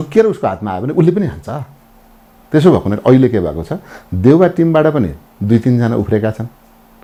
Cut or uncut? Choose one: uncut